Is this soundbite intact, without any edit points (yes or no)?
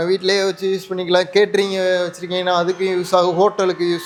yes